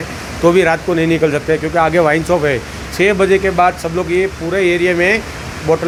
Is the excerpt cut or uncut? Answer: uncut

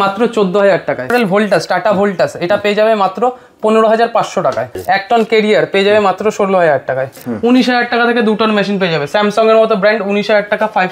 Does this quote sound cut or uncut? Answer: cut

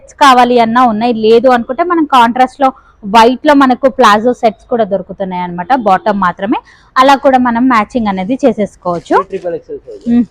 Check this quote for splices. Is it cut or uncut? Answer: uncut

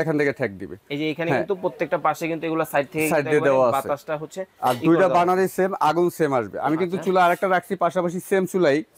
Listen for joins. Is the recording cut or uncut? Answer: uncut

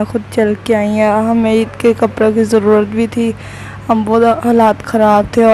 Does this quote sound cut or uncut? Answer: uncut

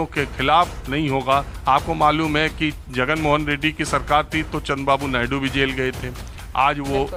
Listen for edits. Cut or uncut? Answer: uncut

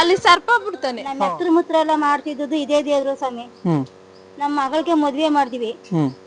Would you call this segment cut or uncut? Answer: cut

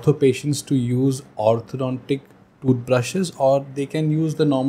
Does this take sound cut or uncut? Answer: uncut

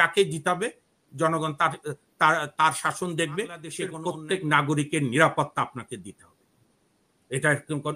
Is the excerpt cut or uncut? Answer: cut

